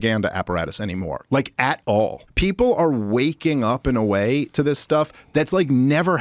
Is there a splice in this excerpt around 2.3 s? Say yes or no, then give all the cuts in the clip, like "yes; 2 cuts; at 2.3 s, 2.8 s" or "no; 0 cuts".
yes; 1 cut; at 2.3 s